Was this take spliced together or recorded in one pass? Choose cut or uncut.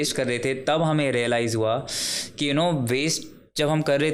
uncut